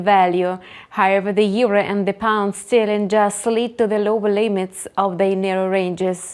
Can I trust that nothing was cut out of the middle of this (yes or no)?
yes